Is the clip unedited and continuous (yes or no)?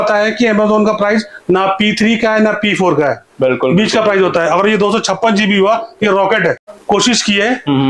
no